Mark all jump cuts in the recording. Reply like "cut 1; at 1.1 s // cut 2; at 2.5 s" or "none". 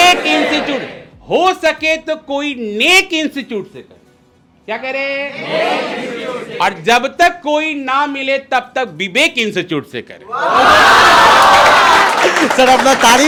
none